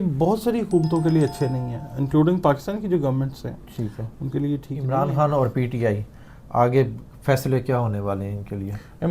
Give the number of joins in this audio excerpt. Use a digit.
1